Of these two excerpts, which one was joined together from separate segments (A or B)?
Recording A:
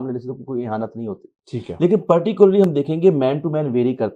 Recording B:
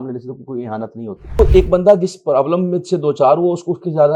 B